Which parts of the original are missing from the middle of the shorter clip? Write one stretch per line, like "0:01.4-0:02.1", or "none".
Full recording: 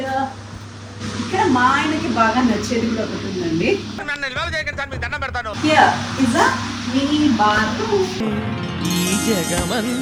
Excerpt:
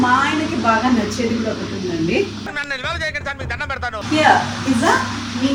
none